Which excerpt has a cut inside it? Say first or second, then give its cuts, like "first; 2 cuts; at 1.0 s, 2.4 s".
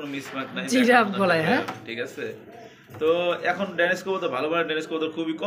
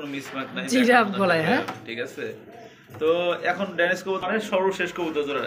second; 1 cut; at 4.2 s